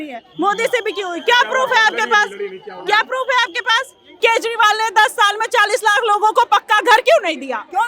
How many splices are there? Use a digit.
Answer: 1